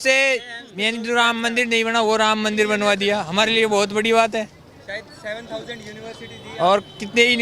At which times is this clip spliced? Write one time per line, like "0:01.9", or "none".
none